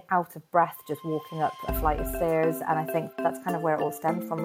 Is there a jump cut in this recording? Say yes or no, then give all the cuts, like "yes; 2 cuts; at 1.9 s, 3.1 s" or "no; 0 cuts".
yes; 1 cut; at 3.2 s